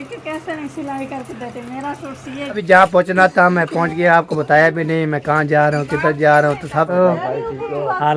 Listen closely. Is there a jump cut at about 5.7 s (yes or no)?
no